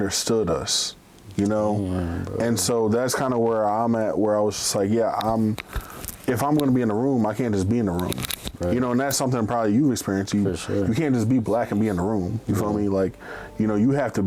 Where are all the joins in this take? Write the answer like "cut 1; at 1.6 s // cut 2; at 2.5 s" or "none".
none